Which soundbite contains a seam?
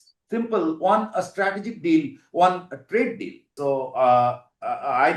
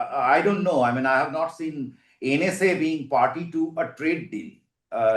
first; 1 cut; at 3.5 s

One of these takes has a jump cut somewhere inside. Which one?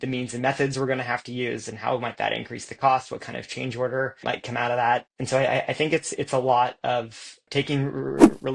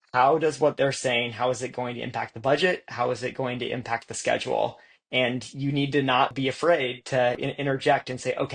first; 2 cuts; at 4.2 s, 5.1 s

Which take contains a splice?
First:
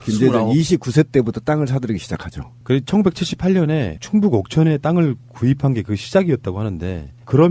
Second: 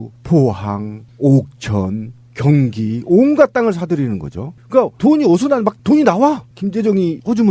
second; 1 cut; at 1.3 s

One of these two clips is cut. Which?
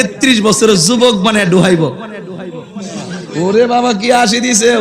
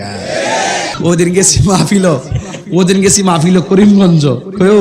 second; 1 cut; at 1.0 s

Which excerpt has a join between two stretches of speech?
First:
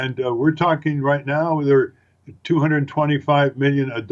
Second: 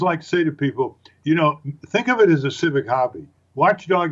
first; 1 cut; at 1.6 s

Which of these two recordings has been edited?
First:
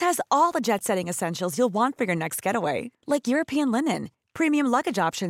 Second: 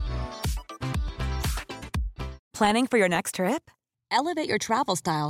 second; 1 cut; at 2.4 s

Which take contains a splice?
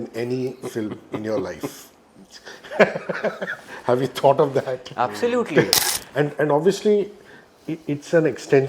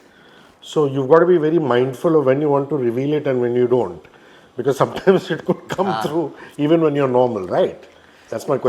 first; 1 cut; at 5.8 s

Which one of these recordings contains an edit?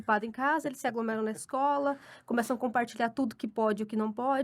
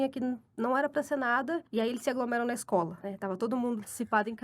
second; 2 cuts; at 1.7 s, 3.0 s

